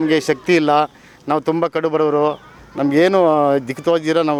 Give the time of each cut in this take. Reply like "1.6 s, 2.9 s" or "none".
none